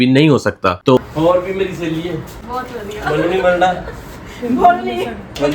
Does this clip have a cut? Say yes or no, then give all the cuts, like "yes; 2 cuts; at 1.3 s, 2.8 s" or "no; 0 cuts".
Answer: yes; 1 cut; at 1.0 s